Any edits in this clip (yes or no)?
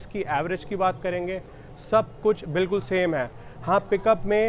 no